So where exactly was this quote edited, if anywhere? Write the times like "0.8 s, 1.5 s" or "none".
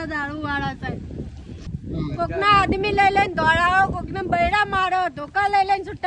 1.6 s